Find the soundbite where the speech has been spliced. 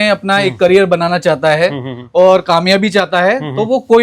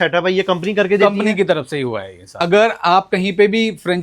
second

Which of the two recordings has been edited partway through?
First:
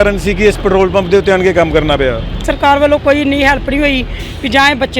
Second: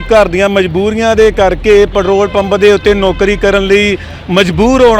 first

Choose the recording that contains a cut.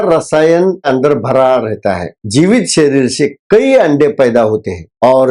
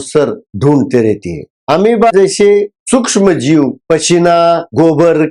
first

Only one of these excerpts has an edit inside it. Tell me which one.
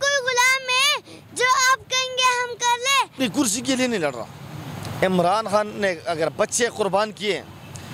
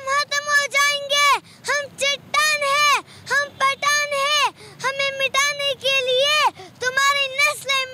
first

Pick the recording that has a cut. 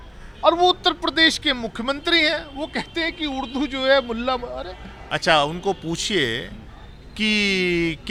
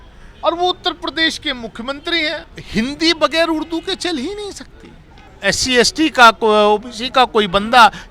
second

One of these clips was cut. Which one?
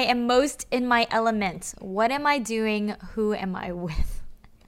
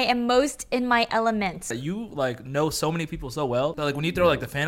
second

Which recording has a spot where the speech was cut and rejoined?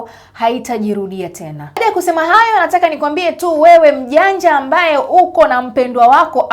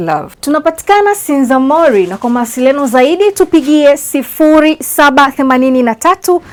first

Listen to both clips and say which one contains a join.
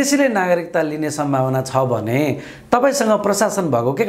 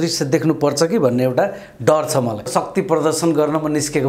second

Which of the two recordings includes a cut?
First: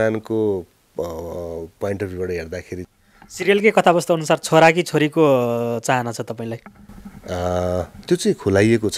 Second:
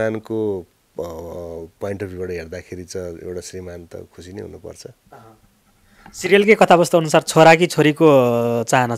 first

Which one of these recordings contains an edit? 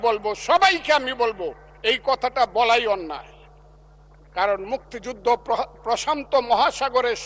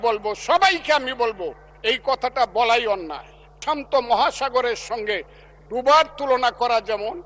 second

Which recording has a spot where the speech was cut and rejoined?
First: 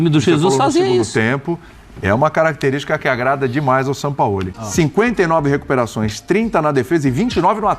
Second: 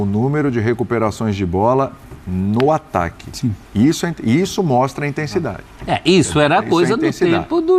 first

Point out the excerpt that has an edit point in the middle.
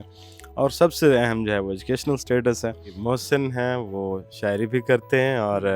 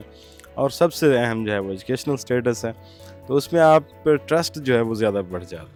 first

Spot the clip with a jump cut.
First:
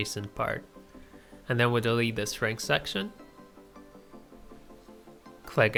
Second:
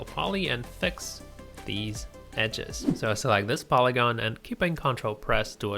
second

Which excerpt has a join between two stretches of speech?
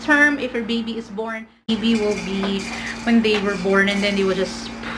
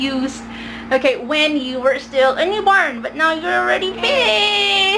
first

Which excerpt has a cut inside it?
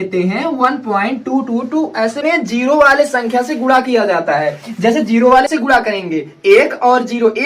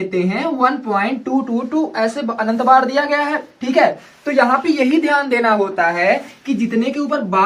first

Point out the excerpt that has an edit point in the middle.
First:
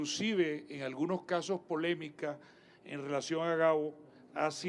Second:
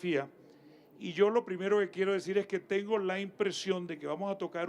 second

